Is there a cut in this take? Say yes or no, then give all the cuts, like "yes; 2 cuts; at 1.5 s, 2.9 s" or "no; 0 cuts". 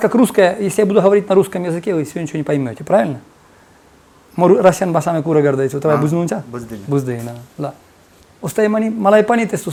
no; 0 cuts